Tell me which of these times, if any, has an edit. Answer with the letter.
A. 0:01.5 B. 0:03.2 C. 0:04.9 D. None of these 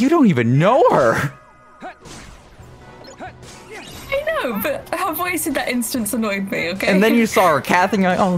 D